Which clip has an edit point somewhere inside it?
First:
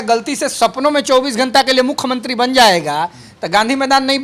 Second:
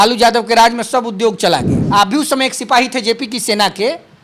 second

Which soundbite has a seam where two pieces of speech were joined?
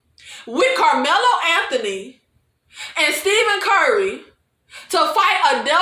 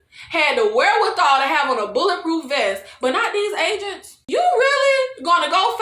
second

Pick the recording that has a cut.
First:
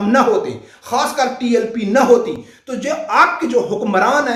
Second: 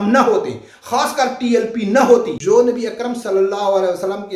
second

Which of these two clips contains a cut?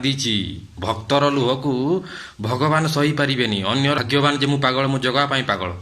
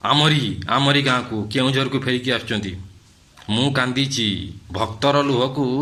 first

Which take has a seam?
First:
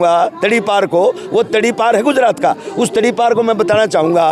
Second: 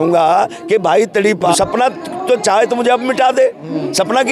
second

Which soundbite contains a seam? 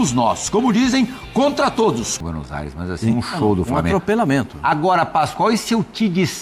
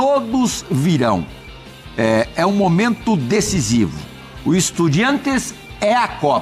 first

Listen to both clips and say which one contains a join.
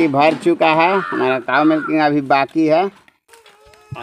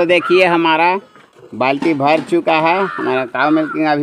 first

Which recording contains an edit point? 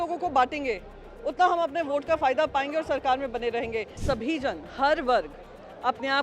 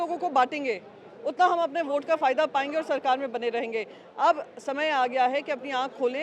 first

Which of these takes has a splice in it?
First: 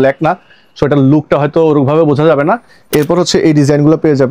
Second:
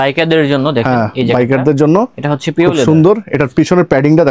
first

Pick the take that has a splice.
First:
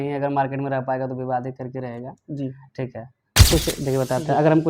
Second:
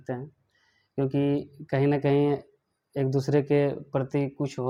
first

